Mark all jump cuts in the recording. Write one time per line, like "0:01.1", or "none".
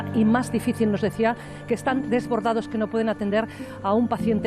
0:02.0